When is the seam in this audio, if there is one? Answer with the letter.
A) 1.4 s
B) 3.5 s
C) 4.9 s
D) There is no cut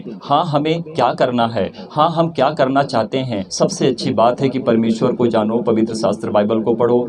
B